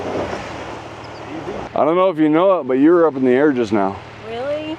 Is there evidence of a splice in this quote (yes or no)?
yes